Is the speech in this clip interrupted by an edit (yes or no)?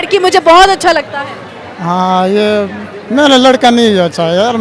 no